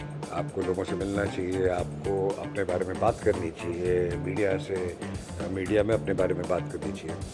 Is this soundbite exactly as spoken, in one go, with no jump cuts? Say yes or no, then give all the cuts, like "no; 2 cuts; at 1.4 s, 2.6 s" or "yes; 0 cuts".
yes; 0 cuts